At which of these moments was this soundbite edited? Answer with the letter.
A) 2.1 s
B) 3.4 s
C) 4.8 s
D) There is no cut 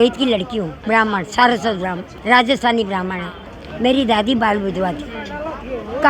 D